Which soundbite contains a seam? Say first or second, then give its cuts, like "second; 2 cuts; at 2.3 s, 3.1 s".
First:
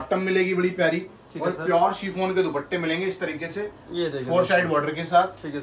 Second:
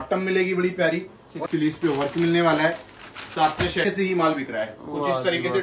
second; 2 cuts; at 1.3 s, 3.9 s